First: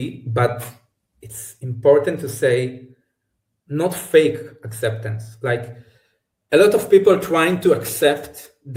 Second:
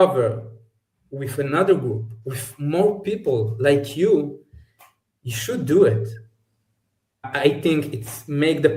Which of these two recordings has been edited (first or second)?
second